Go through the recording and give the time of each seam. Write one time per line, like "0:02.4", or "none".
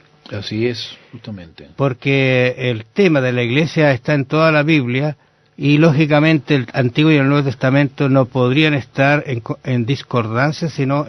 0:06.4